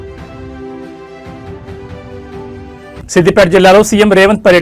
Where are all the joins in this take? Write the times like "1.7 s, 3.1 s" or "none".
2.5 s